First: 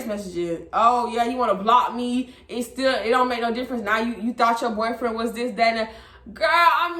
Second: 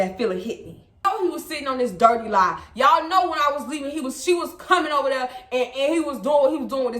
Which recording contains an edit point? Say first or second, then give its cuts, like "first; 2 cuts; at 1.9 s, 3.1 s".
second; 1 cut; at 1.0 s